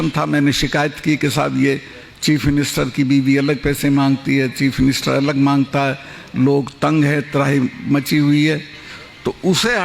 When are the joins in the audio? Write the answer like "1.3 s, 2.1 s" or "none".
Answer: none